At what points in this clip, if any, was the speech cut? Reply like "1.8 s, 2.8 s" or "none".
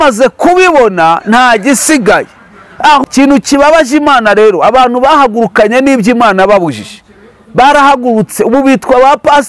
3.0 s